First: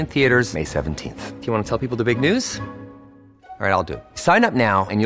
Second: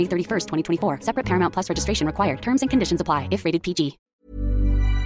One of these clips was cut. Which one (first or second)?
second